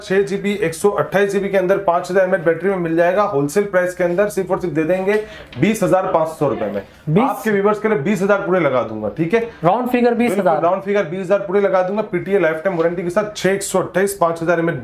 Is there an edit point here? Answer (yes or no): no